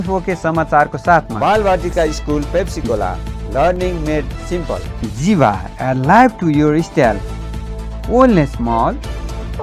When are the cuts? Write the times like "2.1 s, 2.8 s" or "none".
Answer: 1.3 s, 4.9 s